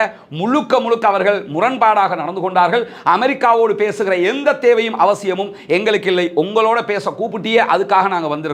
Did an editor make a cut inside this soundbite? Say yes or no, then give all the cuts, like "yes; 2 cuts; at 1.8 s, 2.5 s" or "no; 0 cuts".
no; 0 cuts